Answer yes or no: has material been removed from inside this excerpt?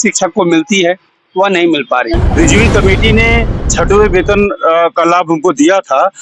yes